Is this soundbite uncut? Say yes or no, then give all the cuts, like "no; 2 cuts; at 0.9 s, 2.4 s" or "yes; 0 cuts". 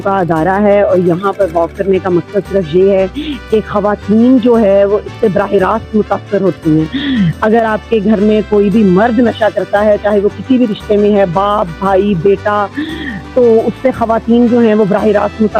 yes; 0 cuts